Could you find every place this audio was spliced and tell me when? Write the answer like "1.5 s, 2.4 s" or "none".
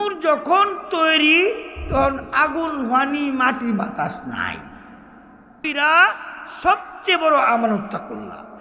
5.6 s